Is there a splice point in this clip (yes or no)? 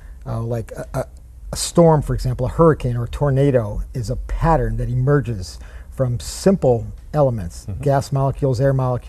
yes